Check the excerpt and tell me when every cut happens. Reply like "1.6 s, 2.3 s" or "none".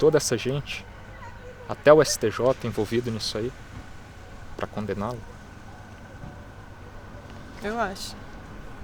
none

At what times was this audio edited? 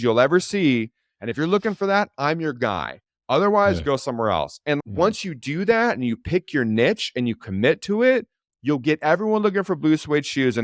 none

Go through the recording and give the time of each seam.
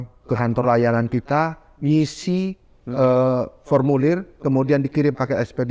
none

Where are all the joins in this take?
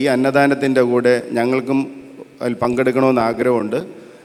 none

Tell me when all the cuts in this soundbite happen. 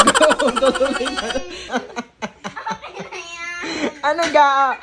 1.7 s

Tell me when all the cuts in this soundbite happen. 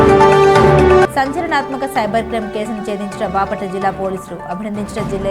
0.9 s

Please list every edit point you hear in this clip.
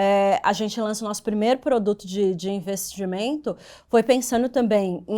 none

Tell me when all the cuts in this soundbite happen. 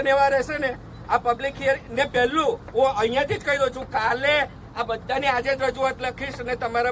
none

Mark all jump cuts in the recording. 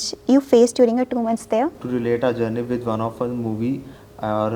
1.8 s

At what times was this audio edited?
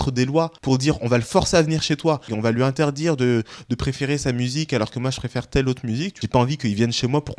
2.3 s, 6.1 s

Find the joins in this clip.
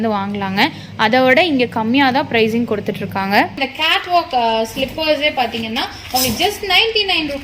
3.5 s

